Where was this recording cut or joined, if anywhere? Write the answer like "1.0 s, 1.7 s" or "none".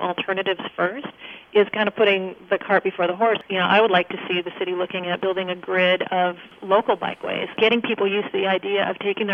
3.4 s, 5.2 s, 6.5 s, 7.5 s